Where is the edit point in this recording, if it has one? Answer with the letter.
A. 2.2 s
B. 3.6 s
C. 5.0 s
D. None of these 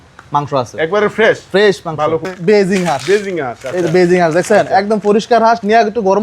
A